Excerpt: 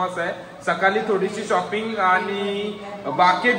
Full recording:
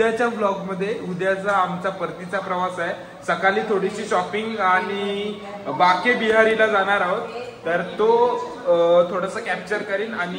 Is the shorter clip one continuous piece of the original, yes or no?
yes